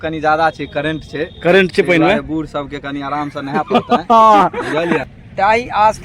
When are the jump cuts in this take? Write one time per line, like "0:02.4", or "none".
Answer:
0:05.0